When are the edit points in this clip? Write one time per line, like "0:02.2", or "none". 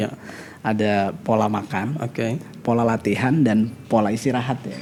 none